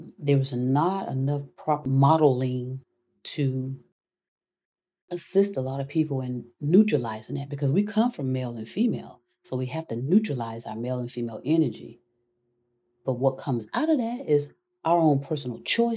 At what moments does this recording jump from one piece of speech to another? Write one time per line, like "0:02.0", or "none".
0:01.8